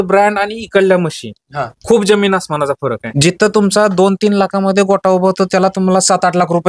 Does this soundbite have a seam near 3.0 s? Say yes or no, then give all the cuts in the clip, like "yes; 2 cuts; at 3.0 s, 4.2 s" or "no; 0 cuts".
yes; 1 cut; at 3.0 s